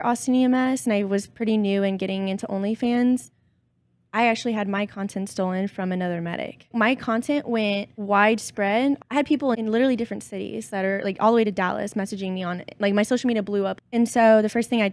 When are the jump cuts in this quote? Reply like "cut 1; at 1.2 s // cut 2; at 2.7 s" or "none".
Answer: cut 1; at 6.7 s // cut 2; at 7.9 s // cut 3; at 9.0 s // cut 4; at 13.8 s